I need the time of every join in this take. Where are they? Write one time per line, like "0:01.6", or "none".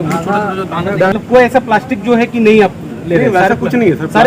0:01.1